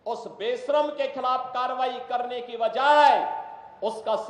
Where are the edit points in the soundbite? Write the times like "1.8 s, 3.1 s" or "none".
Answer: none